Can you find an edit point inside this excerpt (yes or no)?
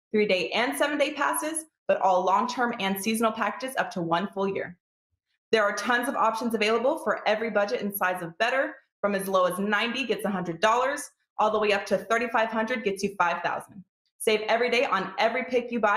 no